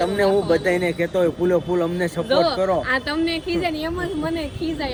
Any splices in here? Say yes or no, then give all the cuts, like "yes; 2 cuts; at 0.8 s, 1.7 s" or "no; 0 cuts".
no; 0 cuts